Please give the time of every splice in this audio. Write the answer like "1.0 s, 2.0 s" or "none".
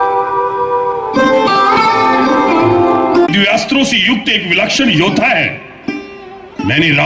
3.3 s